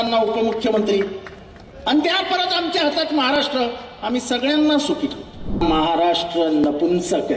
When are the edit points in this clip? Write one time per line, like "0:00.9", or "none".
0:05.6